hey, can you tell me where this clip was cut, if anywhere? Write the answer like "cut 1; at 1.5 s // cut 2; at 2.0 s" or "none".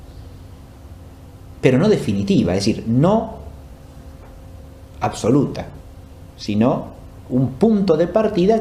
none